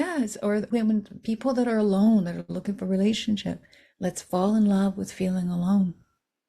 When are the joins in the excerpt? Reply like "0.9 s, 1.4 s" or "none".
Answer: none